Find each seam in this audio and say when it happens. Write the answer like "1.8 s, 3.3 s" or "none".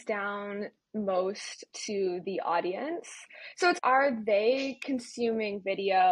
none